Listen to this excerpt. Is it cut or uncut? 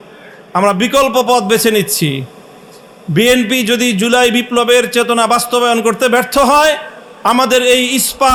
uncut